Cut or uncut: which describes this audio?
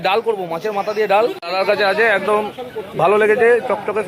cut